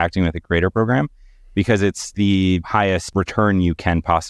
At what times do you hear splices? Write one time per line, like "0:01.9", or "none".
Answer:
none